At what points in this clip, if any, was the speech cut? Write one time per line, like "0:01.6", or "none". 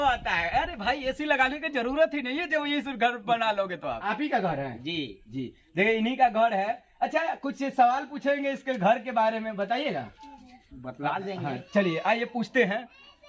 0:04.0

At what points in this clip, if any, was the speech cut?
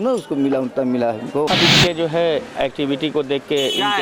0:01.5

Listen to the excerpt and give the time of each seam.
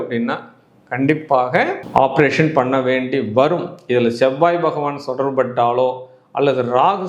none

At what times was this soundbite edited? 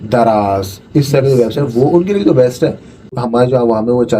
0:03.1

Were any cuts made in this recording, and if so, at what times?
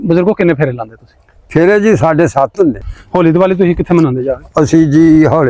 0:02.9

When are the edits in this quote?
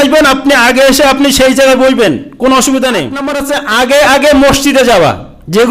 0:03.3

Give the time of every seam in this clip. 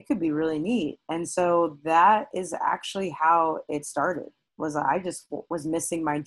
none

